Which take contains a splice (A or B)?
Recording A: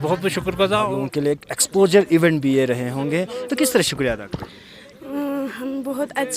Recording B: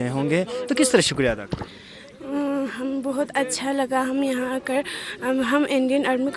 A